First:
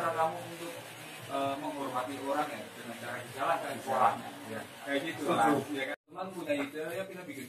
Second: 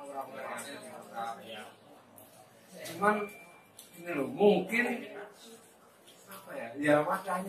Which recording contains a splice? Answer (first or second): first